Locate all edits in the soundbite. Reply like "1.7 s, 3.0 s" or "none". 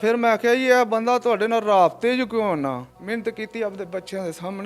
2.9 s